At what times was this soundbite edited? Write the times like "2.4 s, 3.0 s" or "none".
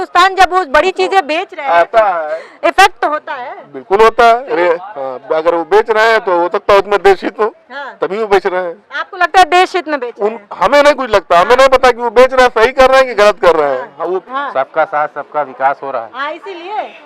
14.2 s